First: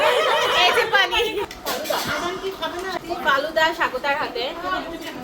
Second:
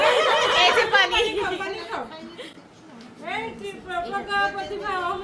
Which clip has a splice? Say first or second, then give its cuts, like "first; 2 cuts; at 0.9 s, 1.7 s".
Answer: first; 2 cuts; at 1.5 s, 2.9 s